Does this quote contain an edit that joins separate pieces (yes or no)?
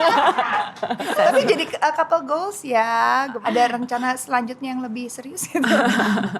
yes